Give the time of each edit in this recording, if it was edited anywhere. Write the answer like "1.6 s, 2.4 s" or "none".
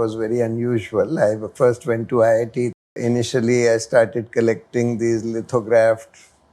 2.9 s